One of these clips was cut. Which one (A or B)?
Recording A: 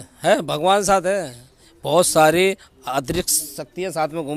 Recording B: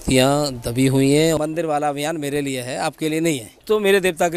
B